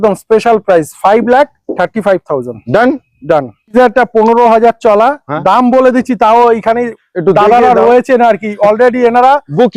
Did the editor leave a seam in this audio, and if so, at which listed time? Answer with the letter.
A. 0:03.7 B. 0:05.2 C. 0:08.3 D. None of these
A